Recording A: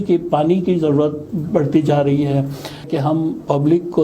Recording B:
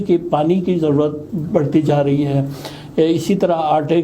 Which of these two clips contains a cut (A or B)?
A